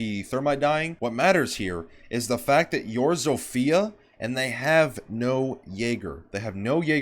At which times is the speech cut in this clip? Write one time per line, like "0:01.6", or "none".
0:00.9